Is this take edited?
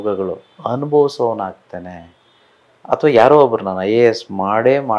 no; 0 cuts

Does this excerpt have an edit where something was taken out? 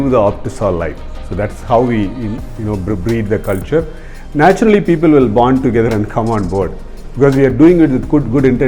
no; 0 cuts

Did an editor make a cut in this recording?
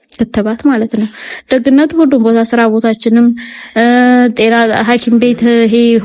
no; 0 cuts

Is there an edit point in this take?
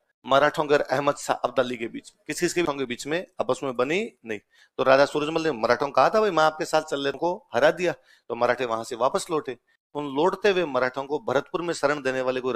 yes; 2 cuts; at 2.7 s, 7.2 s

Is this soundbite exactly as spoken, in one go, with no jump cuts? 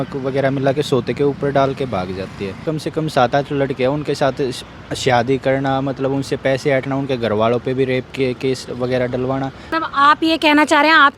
no; 2 cuts; at 2.7 s, 9.7 s

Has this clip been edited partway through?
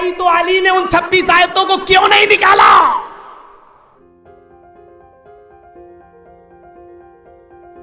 no; 0 cuts

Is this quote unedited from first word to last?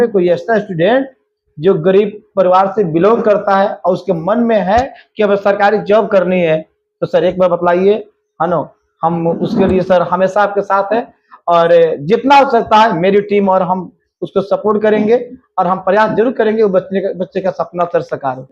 yes; 0 cuts

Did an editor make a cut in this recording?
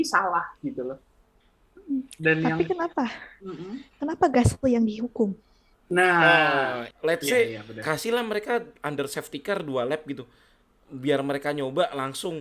yes; 1 cut; at 6.9 s

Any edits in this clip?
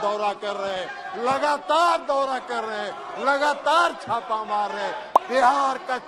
yes; 1 cut; at 5.1 s

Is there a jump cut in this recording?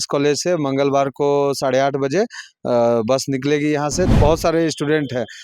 yes; 1 cut; at 4.1 s

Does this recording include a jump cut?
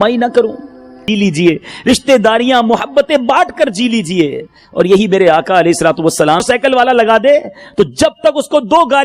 yes; 2 cuts; at 1.0 s, 6.4 s

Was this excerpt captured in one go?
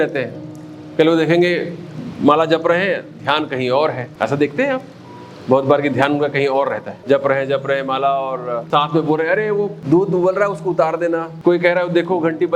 no; 5 cuts; at 4.1 s, 6.9 s, 8.6 s, 9.8 s, 11.3 s

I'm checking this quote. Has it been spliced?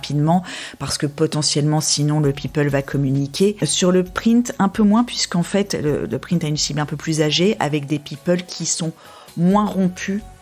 yes; 1 cut; at 3.6 s

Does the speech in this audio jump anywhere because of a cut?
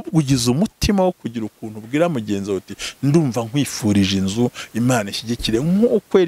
no; 0 cuts

